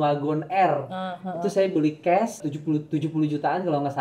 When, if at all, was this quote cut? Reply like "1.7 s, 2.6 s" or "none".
2.5 s